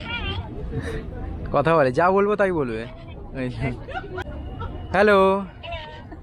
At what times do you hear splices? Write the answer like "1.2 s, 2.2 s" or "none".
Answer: 4.3 s